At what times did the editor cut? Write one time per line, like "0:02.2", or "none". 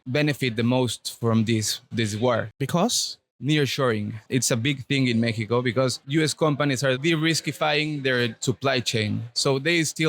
0:04.2
0:06.0
0:07.0